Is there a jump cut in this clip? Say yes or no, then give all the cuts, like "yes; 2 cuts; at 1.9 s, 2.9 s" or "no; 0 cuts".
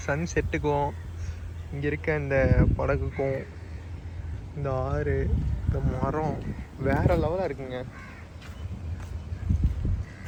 no; 0 cuts